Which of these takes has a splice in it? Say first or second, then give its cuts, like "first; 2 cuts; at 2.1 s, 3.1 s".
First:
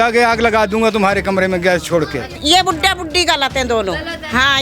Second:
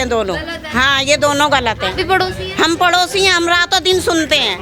first; 1 cut; at 2.4 s